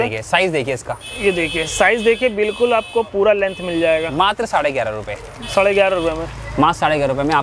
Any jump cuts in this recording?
no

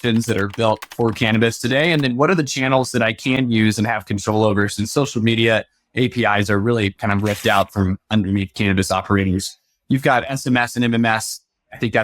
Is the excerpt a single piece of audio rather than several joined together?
yes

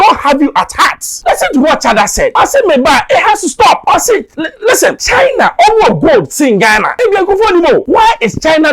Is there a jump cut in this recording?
yes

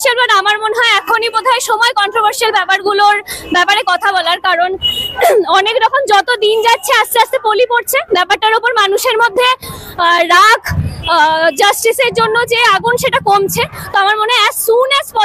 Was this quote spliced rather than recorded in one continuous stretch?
no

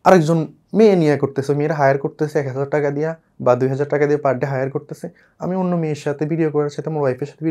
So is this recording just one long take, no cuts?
yes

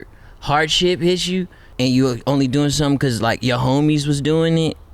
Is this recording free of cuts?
no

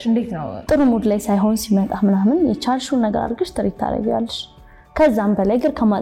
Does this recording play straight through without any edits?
yes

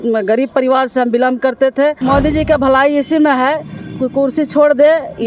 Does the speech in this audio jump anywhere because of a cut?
yes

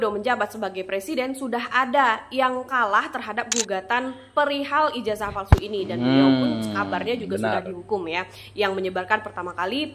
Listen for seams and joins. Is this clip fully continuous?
yes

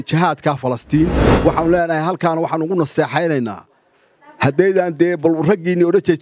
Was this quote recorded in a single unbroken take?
no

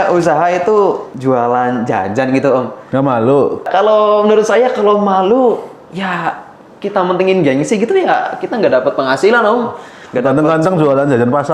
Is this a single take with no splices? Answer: no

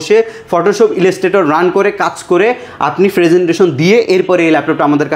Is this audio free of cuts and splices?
yes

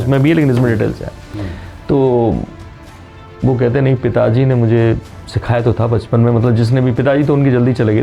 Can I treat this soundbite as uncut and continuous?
yes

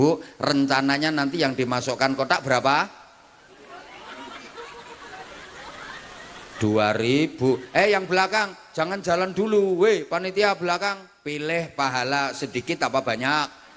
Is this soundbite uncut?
no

